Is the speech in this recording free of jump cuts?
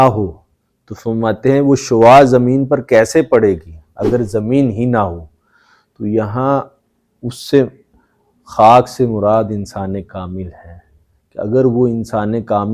yes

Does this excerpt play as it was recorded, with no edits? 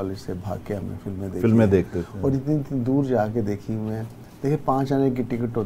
yes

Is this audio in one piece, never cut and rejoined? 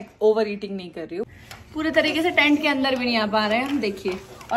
no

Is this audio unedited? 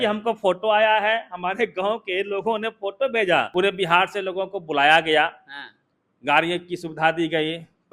no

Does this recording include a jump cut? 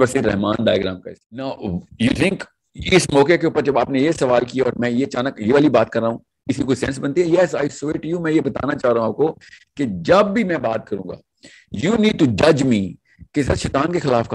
yes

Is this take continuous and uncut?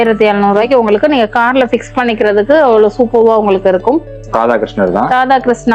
no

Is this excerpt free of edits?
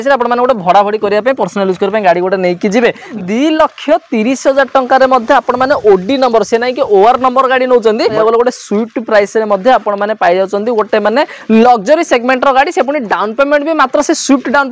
no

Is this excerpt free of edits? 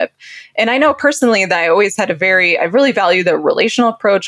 yes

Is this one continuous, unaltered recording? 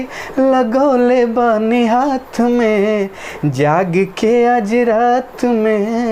yes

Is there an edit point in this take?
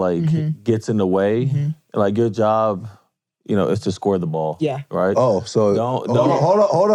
no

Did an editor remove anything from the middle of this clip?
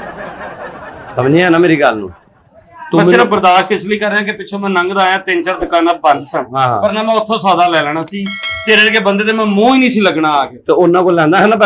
no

